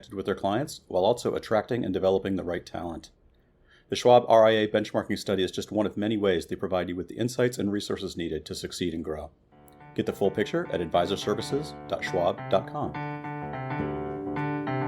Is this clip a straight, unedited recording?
no; 1 cut; at 12.9 s

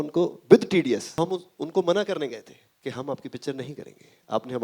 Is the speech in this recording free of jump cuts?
no; 1 cut; at 1.2 s

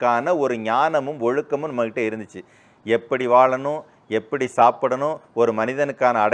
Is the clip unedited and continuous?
yes; 0 cuts

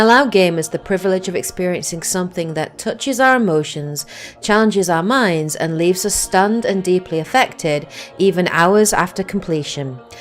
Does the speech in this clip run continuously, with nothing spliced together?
no; 1 cut; at 8.0 s

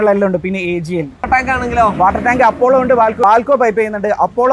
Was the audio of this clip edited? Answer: yes; 2 cuts; at 1.2 s, 3.2 s

